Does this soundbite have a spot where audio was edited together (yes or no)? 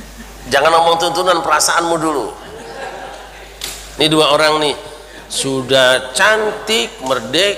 yes